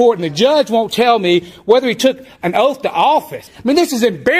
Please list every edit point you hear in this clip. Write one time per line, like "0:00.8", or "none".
0:03.4